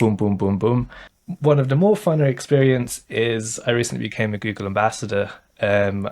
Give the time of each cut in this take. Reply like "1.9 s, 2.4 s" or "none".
1.0 s